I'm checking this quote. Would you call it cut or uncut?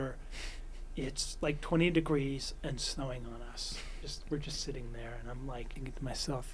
cut